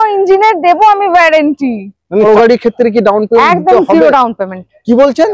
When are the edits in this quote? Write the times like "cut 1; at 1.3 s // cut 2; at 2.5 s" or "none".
cut 1; at 2.2 s